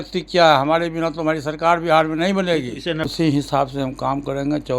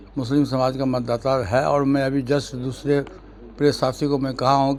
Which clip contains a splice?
first; 1 cut; at 3.1 s

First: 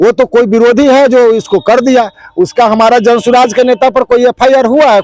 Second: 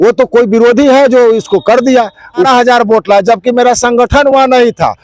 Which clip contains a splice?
second; 1 cut; at 2.5 s

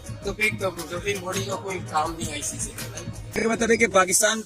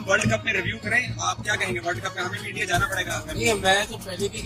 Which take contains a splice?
first; 1 cut; at 3.3 s

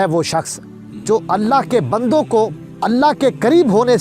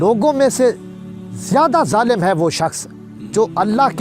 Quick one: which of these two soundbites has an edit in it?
first; 1 cut; at 2.6 s

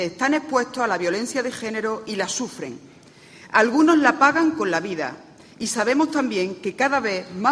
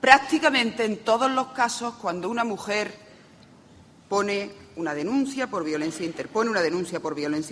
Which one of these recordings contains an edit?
second; 1 cut; at 4.6 s

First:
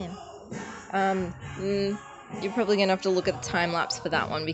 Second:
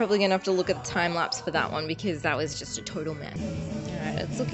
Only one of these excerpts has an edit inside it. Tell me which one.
second; 1 cut; at 3.3 s

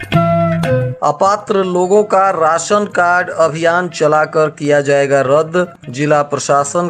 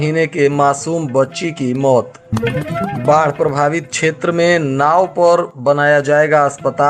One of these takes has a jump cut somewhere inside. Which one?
first; 1 cut; at 0.9 s

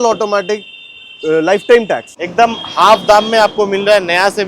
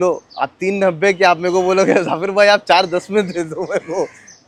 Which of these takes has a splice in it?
first; 1 cut; at 2.1 s

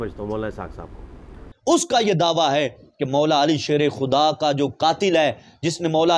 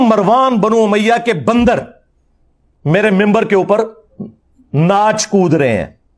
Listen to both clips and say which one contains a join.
first; 1 cut; at 1.4 s

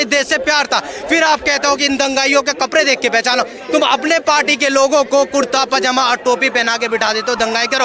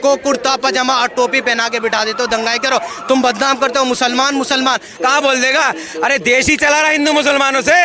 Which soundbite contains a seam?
second; 1 cut; at 4.9 s

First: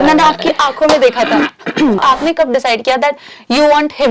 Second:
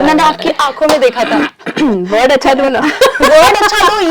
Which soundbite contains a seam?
first; 1 cut; at 2.0 s

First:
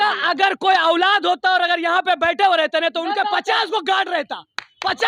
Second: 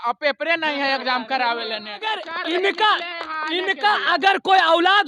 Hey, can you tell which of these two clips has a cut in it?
second; 1 cut; at 2.2 s

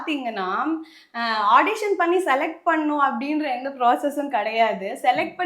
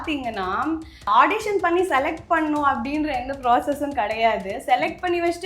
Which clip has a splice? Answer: second; 1 cut; at 1.1 s

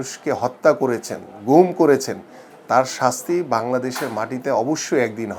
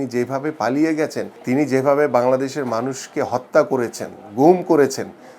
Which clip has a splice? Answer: second; 1 cut; at 1.3 s

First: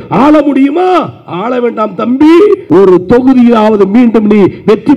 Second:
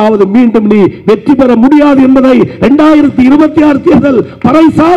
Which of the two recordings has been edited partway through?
first; 1 cut; at 2.6 s

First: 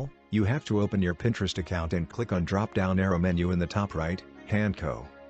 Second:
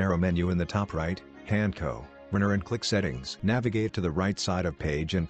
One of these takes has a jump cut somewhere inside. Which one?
second; 1 cut; at 3.2 s

